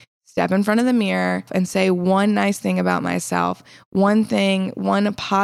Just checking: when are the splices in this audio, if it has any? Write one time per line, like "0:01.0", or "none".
0:01.5